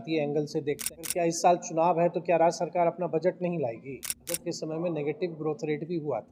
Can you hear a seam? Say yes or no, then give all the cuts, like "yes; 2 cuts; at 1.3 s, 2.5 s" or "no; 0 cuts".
yes; 2 cuts; at 1.0 s, 4.3 s